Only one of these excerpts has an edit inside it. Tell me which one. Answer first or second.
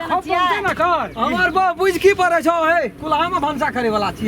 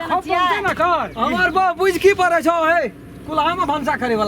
first